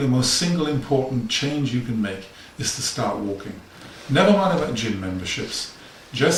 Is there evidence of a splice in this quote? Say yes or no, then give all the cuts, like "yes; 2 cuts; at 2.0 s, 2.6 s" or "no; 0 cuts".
no; 0 cuts